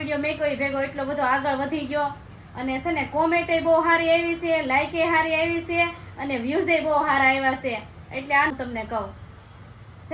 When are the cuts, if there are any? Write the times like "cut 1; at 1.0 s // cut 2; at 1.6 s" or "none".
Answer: cut 1; at 8.5 s